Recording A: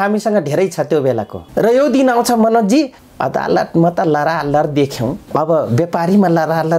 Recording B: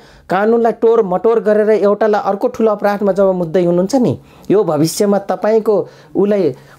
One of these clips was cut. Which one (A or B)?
A